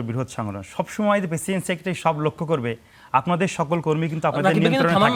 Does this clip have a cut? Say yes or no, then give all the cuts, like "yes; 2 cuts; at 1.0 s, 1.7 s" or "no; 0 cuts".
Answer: no; 0 cuts